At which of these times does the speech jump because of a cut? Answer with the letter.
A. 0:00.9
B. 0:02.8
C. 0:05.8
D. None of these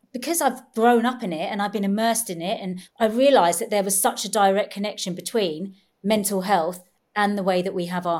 B